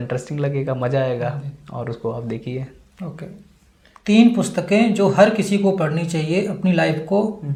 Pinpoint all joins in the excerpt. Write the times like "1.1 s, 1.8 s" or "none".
none